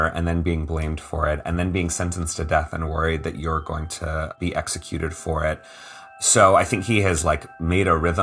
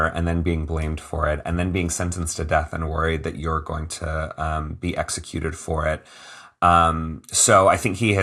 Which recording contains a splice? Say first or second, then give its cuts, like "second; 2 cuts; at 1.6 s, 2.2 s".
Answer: first; 2 cuts; at 4.3 s, 6.0 s